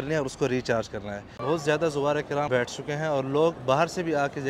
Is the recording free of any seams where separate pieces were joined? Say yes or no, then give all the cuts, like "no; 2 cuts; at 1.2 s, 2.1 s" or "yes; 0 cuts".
no; 3 cuts; at 1.4 s, 2.5 s, 3.6 s